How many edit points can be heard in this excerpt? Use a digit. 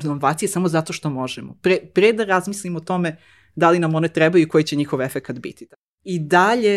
1